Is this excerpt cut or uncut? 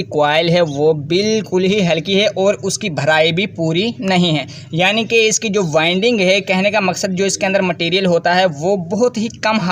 uncut